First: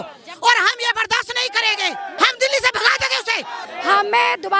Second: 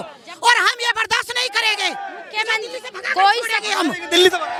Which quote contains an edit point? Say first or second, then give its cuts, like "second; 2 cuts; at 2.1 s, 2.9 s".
first; 2 cuts; at 2.2 s, 3.7 s